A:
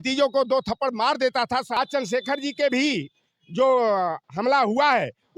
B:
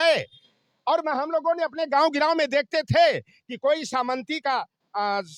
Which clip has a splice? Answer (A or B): A